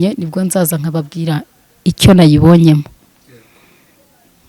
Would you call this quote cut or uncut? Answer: uncut